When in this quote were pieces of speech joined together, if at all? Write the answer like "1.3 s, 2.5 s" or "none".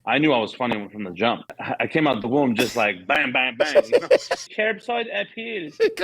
1.6 s, 4.4 s

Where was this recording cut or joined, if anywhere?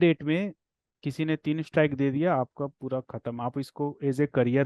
none

